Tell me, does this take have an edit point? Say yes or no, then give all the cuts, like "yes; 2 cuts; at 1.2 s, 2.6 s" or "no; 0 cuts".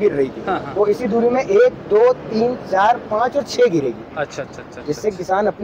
no; 0 cuts